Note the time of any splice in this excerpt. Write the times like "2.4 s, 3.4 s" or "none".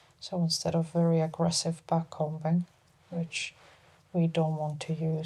none